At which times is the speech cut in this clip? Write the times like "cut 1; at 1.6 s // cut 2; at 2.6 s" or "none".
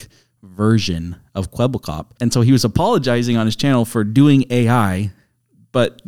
cut 1; at 2.1 s